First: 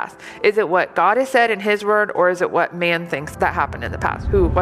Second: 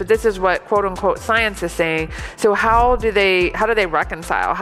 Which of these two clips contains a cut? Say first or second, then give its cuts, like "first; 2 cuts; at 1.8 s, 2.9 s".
first; 1 cut; at 3.2 s